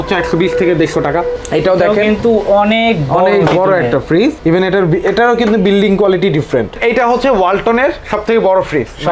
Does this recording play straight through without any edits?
no; 1 cut; at 6.8 s

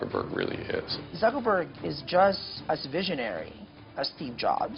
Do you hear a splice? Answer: yes; 2 cuts; at 1.0 s, 2.5 s

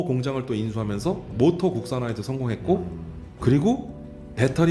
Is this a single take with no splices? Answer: yes; 0 cuts

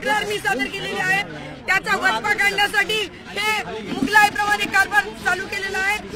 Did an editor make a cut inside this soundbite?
no; 0 cuts

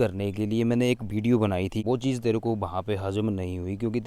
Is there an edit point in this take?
yes; 1 cut; at 1.8 s

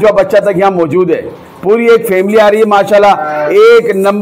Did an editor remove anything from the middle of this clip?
no; 0 cuts

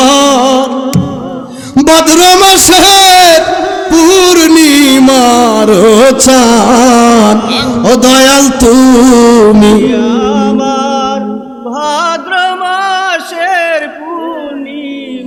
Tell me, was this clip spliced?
no; 0 cuts

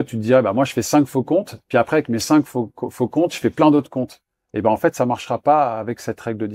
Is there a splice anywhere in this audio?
no; 0 cuts

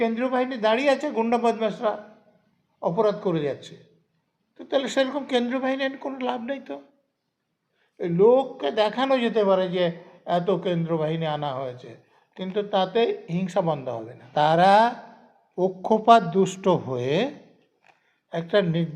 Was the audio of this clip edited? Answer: yes; 1 cut; at 14.1 s

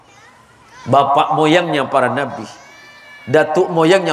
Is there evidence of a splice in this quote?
no; 0 cuts

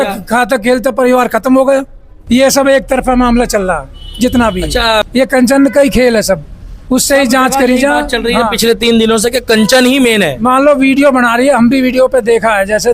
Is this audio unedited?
no; 2 cuts; at 2.1 s, 5.0 s

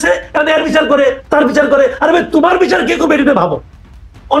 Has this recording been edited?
no; 0 cuts

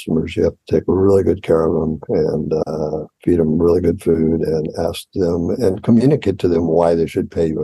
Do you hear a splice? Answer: no; 0 cuts

